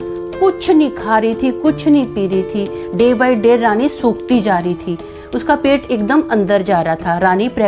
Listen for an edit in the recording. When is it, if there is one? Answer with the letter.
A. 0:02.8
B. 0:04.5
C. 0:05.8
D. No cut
A